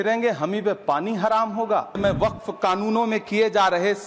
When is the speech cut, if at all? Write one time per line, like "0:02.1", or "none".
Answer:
0:02.0